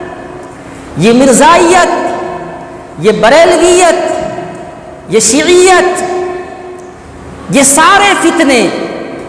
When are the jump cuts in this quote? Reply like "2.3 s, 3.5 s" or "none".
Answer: none